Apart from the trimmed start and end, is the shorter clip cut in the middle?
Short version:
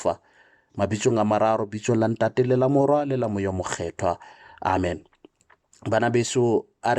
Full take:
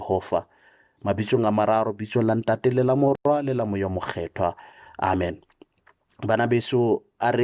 yes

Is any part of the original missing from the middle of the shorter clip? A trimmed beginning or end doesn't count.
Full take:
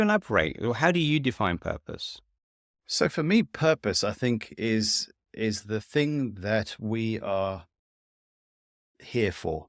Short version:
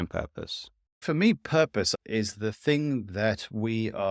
yes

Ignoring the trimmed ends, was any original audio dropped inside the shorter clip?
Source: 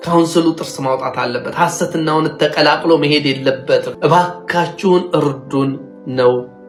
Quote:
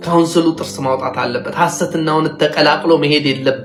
no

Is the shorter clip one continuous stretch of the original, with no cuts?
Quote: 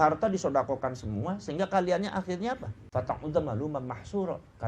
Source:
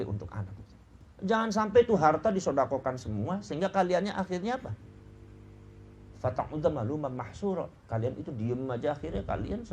no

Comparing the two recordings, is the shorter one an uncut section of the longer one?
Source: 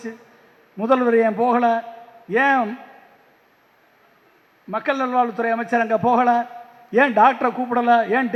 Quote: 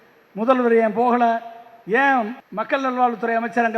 no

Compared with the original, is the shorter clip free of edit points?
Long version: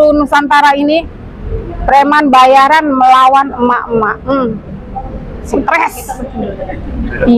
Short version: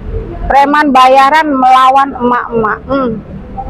yes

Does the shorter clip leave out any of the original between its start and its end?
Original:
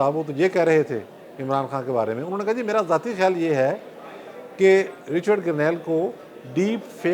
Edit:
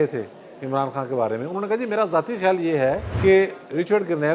yes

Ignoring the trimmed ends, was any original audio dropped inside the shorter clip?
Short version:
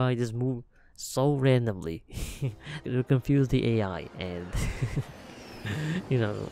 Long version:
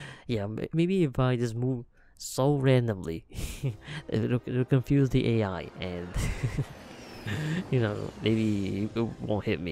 yes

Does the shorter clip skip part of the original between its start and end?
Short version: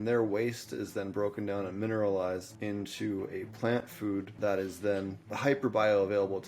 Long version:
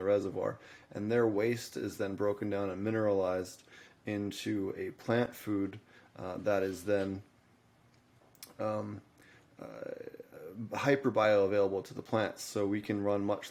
yes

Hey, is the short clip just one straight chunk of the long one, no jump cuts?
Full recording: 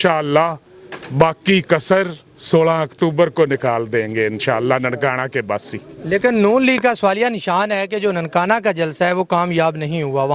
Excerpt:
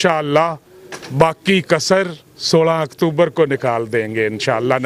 yes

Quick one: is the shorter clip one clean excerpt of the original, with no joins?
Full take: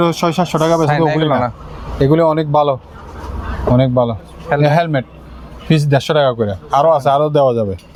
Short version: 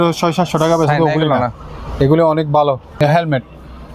no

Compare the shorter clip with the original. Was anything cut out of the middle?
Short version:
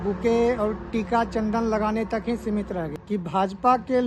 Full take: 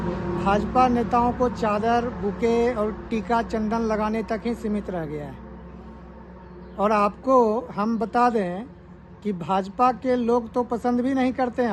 yes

